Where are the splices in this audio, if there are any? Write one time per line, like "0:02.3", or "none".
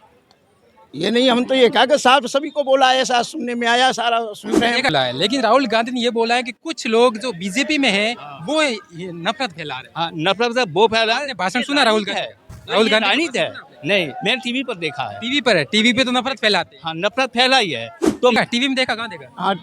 0:04.9
0:18.4